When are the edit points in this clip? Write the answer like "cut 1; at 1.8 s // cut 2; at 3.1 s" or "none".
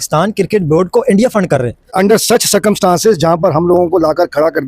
cut 1; at 1.9 s